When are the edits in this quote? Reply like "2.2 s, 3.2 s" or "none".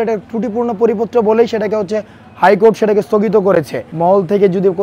3.8 s